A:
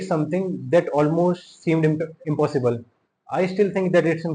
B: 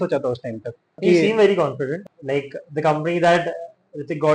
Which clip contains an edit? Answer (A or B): B